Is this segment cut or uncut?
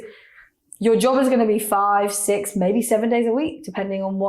uncut